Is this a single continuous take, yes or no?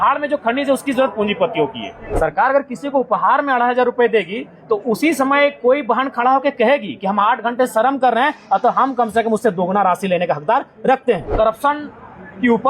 no